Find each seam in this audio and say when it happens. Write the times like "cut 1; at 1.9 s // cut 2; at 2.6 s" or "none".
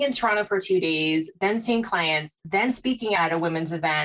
cut 1; at 3.0 s